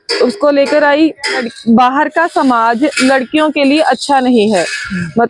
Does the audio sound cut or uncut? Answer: cut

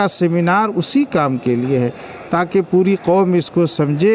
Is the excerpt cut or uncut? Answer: uncut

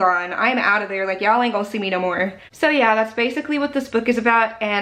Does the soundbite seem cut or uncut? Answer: uncut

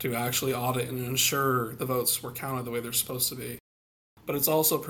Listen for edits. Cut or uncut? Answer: uncut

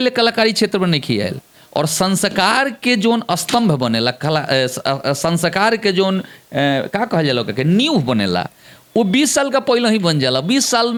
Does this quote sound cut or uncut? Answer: uncut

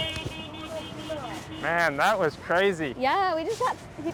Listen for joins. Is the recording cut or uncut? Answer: uncut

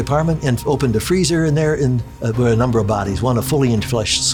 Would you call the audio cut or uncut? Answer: uncut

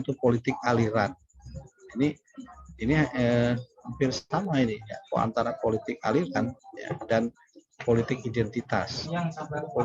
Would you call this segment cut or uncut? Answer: uncut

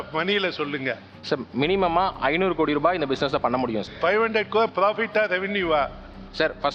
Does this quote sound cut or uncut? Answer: uncut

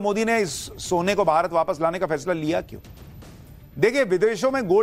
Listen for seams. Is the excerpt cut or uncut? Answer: cut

